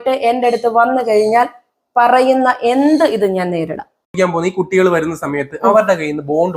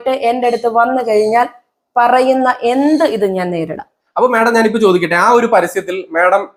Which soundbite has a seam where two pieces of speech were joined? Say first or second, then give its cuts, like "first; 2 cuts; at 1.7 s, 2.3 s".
first; 1 cut; at 4.1 s